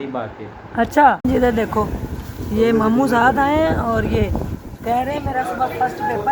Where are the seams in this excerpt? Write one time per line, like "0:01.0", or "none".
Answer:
0:01.2